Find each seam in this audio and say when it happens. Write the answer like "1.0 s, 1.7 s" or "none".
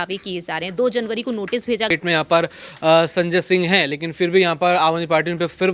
1.9 s